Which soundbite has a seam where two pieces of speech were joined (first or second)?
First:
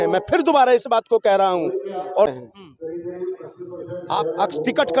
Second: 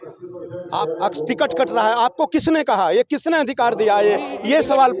first